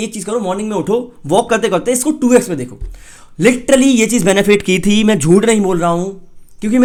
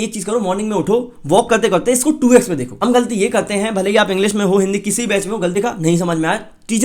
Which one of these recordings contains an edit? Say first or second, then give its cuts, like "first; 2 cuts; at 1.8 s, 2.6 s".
second; 2 cuts; at 2.7 s, 5.6 s